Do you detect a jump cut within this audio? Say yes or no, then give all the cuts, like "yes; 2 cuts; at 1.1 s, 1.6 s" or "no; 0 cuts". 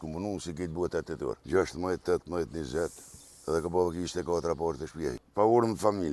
yes; 2 cuts; at 1.4 s, 5.2 s